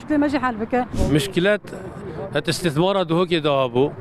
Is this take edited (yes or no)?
yes